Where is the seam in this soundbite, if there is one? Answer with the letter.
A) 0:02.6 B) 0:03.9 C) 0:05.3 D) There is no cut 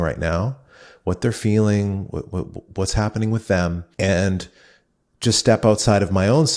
B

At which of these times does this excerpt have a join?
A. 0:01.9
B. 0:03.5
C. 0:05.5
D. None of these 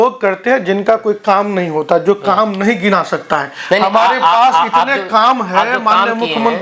D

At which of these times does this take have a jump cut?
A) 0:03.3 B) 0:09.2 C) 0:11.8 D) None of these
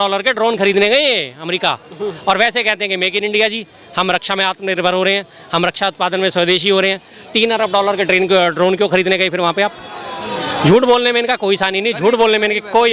D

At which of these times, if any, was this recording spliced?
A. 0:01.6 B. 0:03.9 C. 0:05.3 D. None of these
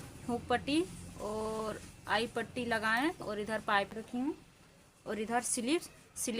B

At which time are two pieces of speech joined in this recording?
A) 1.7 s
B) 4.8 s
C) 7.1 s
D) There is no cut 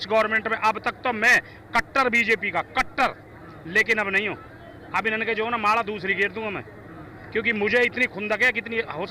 D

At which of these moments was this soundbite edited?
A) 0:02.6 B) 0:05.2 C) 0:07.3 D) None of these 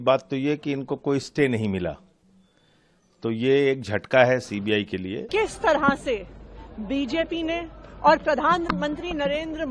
B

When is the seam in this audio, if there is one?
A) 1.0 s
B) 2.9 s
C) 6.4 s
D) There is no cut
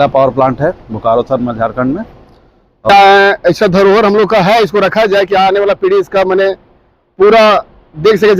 B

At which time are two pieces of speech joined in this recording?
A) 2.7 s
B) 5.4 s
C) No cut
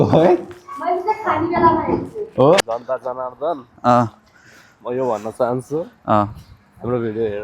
A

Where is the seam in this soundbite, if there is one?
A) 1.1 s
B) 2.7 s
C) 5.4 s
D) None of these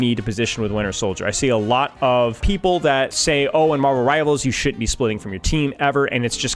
B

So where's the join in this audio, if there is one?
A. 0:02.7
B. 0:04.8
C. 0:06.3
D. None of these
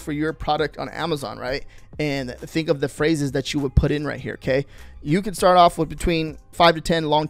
D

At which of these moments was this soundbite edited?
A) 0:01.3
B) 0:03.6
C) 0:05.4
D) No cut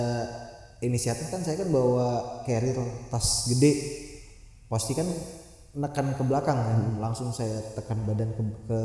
D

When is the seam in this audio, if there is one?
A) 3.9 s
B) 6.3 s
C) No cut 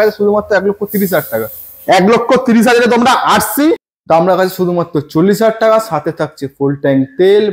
A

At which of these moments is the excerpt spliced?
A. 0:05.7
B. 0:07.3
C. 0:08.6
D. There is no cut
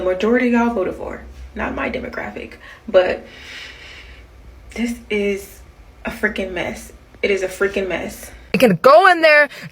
C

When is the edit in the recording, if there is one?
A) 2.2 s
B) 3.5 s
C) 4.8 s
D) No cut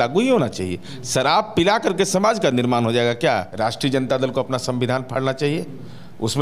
B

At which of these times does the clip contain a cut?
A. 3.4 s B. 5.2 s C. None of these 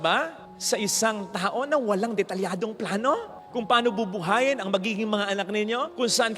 C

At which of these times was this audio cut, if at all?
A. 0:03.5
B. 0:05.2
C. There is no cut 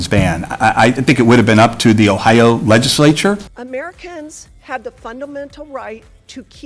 A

